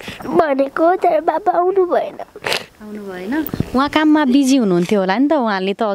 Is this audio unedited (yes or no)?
yes